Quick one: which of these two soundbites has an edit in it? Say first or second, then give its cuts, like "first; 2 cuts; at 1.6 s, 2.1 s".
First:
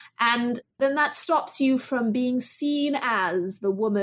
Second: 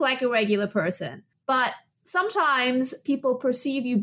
second; 2 cuts; at 1.3 s, 1.9 s